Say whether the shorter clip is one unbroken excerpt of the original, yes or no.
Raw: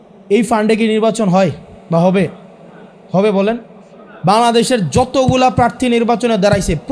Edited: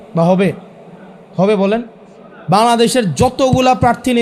yes